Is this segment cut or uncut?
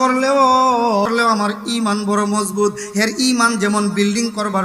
cut